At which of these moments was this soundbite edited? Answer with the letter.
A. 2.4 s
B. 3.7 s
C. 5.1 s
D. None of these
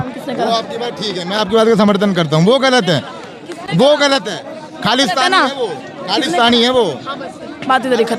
D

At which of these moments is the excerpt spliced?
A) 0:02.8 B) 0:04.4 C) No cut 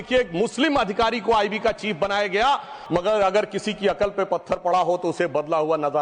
A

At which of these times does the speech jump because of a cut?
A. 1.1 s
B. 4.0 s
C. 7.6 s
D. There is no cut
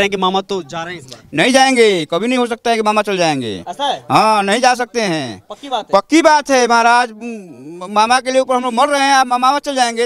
A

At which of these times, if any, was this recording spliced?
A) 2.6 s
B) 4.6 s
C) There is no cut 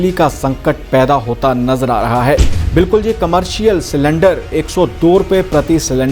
A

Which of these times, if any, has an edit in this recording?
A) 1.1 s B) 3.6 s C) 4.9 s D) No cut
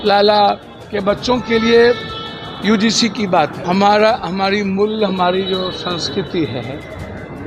B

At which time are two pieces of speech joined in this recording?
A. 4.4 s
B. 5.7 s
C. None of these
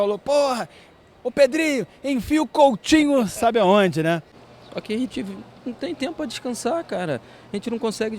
A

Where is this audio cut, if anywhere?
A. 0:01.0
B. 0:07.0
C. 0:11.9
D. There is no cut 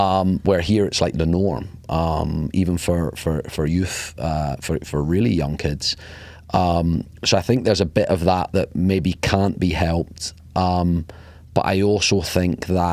D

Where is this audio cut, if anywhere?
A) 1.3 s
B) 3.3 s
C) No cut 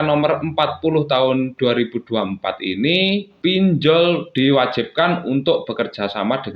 B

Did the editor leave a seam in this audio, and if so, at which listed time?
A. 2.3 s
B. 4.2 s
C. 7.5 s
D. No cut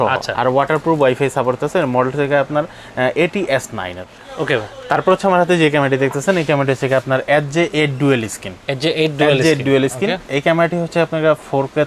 B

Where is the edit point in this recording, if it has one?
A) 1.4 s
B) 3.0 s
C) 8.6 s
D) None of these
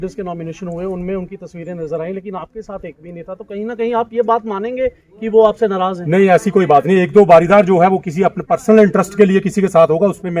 D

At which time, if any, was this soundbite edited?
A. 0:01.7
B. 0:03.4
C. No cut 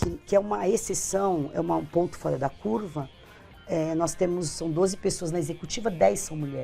C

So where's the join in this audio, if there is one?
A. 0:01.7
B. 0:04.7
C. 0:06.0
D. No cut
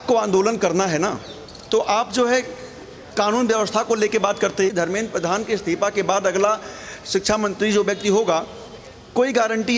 B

